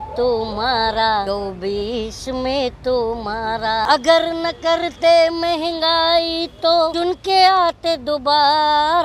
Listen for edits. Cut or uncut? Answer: cut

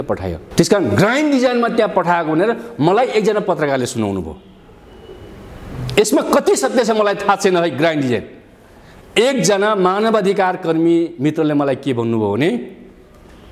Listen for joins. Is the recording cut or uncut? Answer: uncut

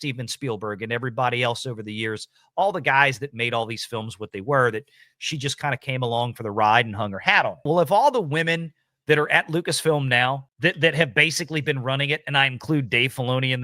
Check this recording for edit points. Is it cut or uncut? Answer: cut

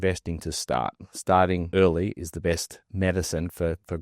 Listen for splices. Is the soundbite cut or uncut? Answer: cut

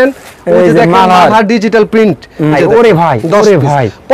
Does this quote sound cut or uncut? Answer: cut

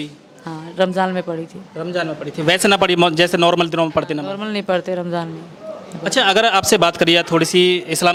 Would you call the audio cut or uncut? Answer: uncut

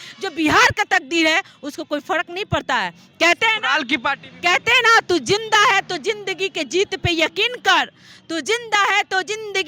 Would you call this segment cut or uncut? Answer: uncut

